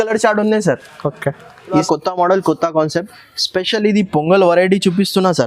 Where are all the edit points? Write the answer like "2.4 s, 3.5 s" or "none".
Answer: 1.8 s